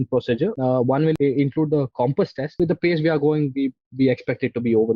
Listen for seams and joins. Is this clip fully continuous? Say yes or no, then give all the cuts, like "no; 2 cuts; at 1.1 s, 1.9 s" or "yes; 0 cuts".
no; 2 cuts; at 1.0 s, 2.6 s